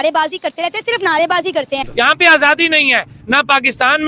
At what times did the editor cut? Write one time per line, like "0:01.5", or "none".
0:01.9